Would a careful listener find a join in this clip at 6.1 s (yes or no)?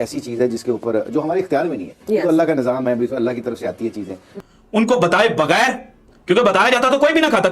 no